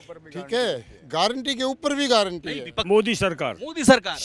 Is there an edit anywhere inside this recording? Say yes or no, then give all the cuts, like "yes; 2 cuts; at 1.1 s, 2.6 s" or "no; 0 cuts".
yes; 1 cut; at 2.8 s